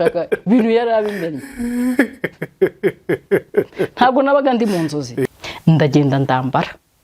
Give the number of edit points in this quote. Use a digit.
1